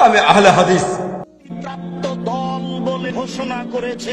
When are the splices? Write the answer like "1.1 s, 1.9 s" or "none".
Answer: 1.5 s, 3.0 s